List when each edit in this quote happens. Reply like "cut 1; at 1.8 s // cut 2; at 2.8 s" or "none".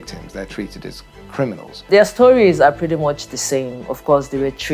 cut 1; at 1.7 s

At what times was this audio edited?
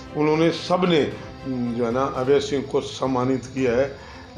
none

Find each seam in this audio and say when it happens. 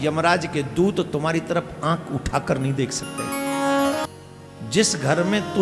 cut 1; at 4.0 s

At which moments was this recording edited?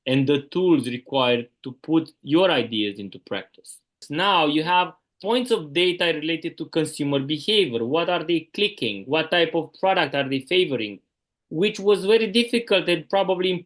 cut 1; at 4.1 s // cut 2; at 5.1 s

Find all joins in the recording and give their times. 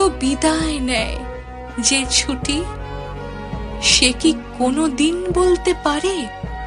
cut 1; at 2.7 s // cut 2; at 4.0 s

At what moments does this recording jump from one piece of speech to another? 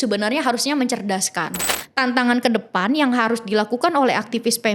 cut 1; at 1.7 s

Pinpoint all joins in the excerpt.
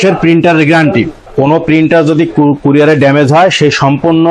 cut 1; at 1.3 s

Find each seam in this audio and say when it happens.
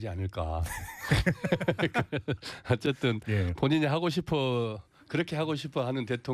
cut 1; at 3.2 s

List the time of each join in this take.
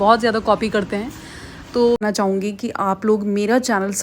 cut 1; at 2.0 s

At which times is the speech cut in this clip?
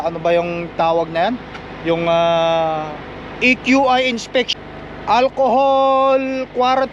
cut 1; at 4.5 s

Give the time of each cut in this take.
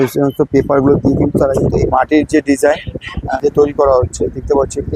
cut 1; at 1.9 s // cut 2; at 3.3 s

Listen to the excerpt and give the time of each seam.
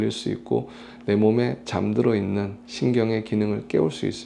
cut 1; at 2.6 s

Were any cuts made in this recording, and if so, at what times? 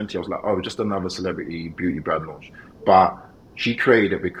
none

